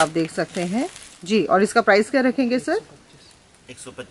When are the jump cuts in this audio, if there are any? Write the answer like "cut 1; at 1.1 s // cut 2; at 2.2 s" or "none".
none